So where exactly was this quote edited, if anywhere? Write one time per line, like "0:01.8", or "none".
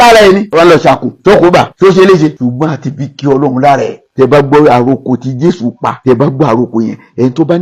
0:04.1